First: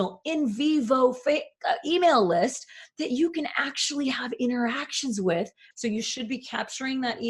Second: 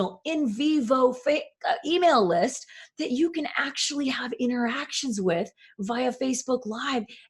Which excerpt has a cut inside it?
first; 1 cut; at 5.7 s

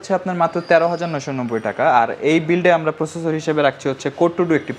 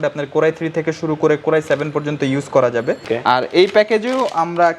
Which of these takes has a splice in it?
second; 1 cut; at 3.0 s

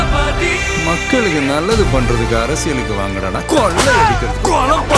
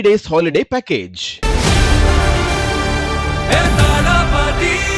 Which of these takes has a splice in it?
second; 1 cut; at 1.3 s

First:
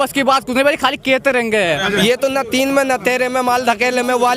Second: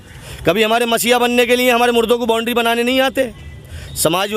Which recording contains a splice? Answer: first; 1 cut; at 1.9 s

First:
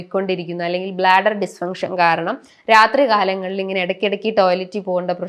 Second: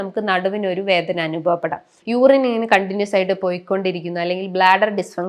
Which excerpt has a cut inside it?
second; 1 cut; at 1.9 s

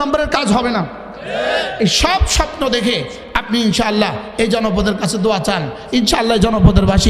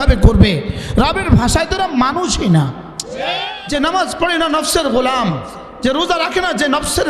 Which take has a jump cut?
second; 1 cut; at 3.4 s

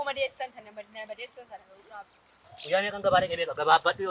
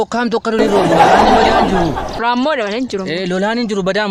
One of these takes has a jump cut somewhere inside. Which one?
first; 1 cut; at 2.3 s

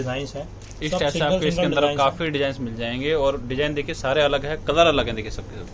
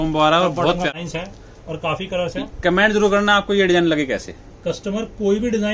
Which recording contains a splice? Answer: second; 1 cut; at 0.9 s

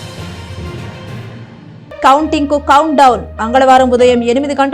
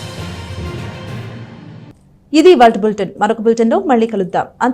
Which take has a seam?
first; 1 cut; at 1.8 s

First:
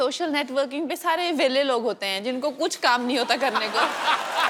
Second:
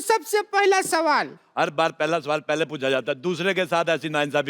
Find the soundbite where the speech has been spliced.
second; 1 cut; at 1.4 s

